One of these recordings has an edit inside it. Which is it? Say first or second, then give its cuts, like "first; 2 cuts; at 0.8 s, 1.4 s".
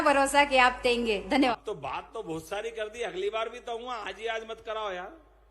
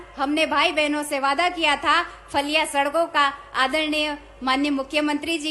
first; 1 cut; at 1.6 s